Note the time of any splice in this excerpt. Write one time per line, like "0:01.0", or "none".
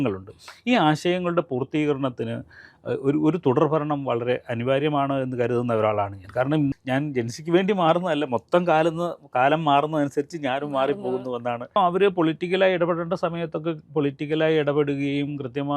0:06.7
0:11.8

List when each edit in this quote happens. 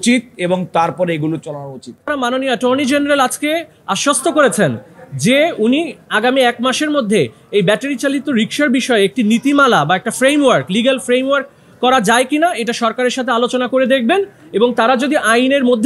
0:02.1

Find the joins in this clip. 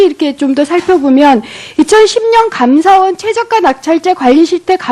0:03.4

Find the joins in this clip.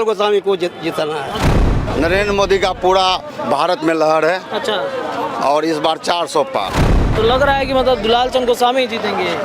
0:01.8
0:06.8

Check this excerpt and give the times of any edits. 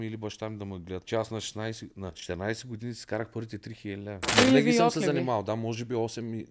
0:01.0
0:02.2
0:04.3

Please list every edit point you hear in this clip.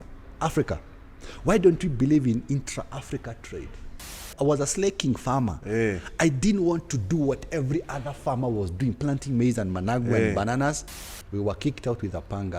0:04.3
0:10.9

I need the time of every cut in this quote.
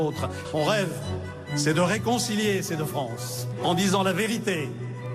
0:04.3

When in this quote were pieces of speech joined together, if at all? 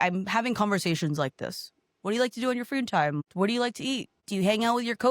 0:03.2
0:04.2

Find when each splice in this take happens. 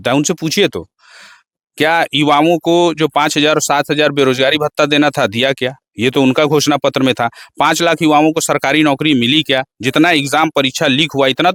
none

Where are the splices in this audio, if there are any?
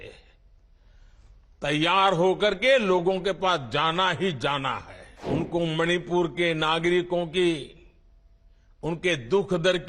0:04.8

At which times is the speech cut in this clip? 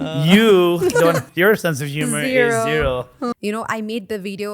0:03.3

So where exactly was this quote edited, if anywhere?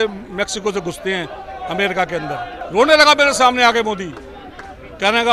0:02.6

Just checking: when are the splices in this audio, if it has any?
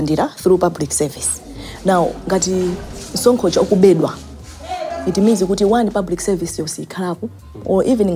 none

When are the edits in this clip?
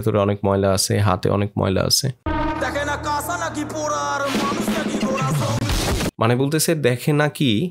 0:02.2
0:06.1

